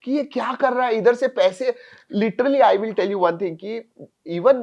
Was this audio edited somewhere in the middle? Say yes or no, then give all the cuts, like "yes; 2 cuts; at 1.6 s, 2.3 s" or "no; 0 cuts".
no; 0 cuts